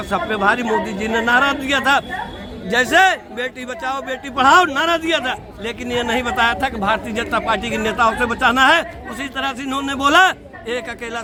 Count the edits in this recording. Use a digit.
0